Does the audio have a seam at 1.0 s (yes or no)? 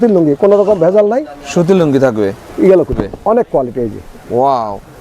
no